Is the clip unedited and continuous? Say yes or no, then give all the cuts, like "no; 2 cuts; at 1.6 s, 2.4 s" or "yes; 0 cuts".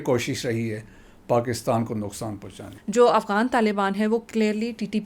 no; 1 cut; at 2.7 s